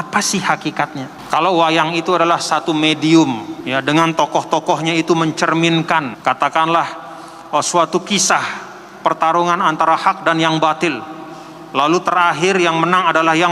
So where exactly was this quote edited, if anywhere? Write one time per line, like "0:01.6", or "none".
0:01.1
0:03.5
0:06.1